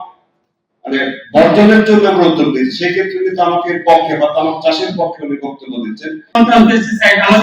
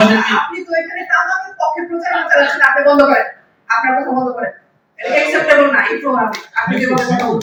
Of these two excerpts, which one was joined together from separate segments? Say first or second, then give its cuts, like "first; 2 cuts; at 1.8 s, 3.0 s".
first; 1 cut; at 6.3 s